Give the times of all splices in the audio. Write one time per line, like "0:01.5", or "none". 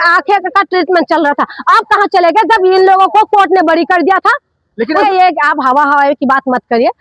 0:05.0